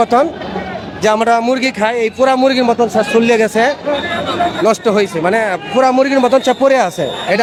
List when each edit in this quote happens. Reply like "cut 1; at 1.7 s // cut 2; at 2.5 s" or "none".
none